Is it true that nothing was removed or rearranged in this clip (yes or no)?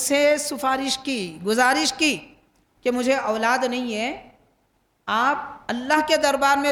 yes